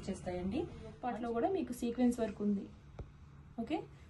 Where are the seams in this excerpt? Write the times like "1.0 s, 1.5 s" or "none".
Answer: 1.0 s